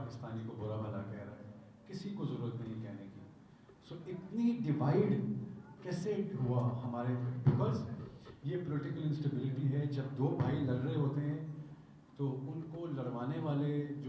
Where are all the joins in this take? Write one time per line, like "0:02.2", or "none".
none